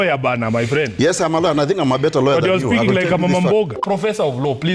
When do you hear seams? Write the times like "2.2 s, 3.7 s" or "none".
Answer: 3.8 s